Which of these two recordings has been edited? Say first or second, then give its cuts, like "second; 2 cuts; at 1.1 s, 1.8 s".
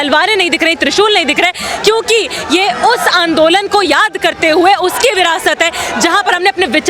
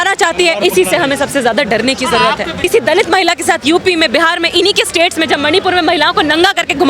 second; 1 cut; at 2.6 s